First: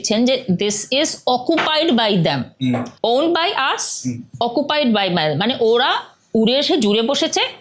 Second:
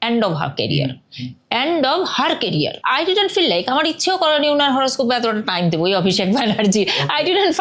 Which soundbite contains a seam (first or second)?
second